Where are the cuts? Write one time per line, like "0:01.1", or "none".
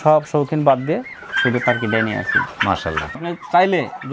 0:03.1